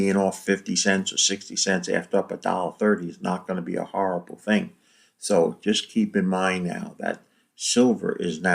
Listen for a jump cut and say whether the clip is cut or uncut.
uncut